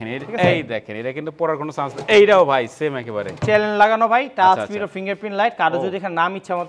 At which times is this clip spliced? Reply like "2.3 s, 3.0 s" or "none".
none